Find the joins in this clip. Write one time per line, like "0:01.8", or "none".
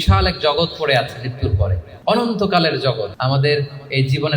0:01.9
0:03.1